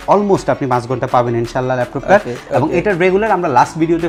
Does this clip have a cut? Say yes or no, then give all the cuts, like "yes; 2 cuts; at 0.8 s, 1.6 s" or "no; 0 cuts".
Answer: no; 0 cuts